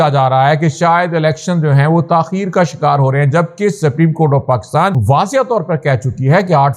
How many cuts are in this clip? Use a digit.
1